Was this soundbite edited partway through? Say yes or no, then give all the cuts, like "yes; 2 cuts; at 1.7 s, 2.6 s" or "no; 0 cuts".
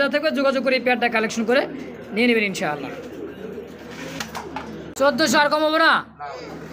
yes; 1 cut; at 4.9 s